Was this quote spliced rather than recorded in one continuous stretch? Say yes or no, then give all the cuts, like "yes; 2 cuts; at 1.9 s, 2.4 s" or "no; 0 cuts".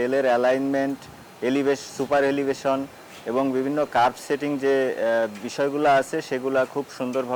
no; 0 cuts